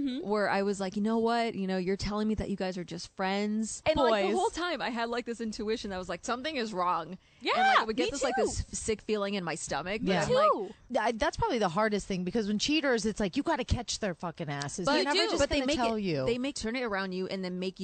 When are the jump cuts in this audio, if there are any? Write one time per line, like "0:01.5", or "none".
0:03.8
0:10.8
0:16.5